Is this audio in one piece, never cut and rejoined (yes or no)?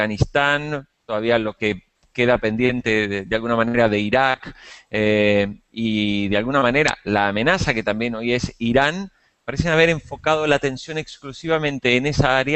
yes